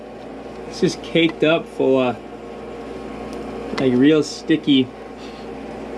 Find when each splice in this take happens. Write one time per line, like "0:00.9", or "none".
none